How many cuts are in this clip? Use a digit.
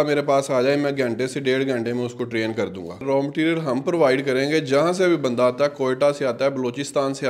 1